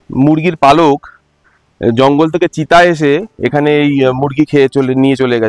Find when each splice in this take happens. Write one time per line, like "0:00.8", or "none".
none